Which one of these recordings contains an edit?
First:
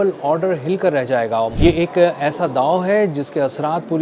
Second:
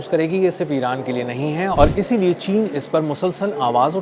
first; 1 cut; at 1.5 s

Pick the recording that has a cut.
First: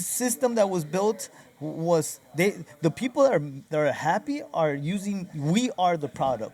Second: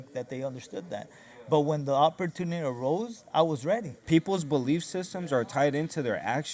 second; 1 cut; at 4.0 s

